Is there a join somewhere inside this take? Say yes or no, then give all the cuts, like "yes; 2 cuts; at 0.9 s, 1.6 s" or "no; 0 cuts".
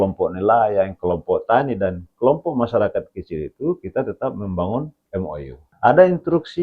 yes; 1 cut; at 5.6 s